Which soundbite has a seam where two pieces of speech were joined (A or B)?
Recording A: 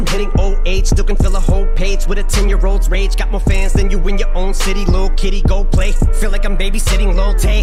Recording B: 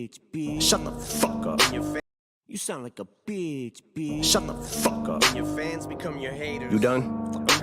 B